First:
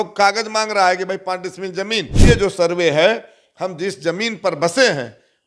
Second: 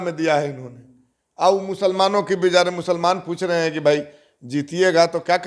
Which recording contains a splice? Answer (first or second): first